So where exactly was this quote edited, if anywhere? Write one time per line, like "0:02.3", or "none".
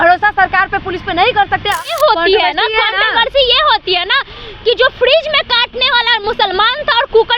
0:01.8